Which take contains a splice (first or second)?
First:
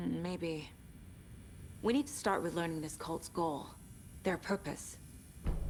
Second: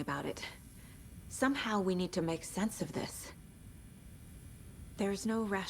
second